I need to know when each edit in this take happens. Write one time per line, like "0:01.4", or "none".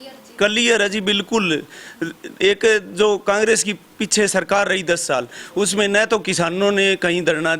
none